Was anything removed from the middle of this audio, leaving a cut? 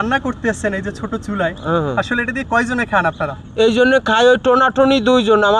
no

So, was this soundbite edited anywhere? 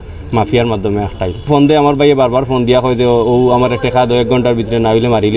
yes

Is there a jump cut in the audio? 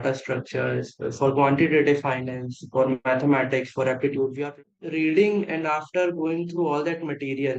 yes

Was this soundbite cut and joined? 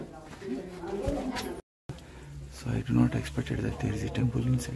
yes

